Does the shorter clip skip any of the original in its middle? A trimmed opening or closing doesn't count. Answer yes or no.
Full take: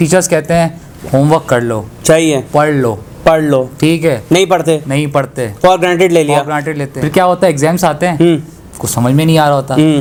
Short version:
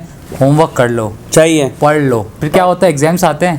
yes